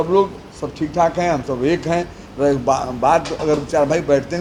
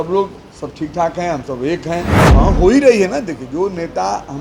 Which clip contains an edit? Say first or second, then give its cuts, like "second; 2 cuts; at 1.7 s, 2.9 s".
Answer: second; 1 cut; at 2.2 s